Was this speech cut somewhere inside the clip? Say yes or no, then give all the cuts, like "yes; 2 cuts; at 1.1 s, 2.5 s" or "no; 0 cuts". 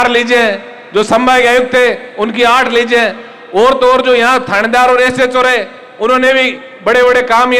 no; 0 cuts